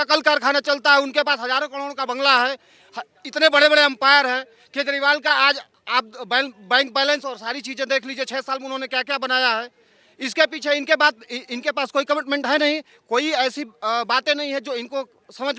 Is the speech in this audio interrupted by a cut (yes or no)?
no